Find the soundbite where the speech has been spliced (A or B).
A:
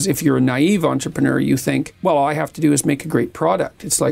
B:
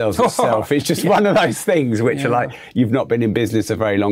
A